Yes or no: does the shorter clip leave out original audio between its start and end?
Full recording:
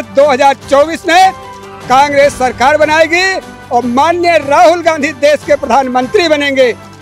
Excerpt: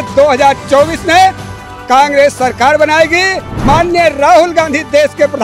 yes